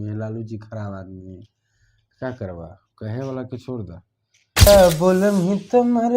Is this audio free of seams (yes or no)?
no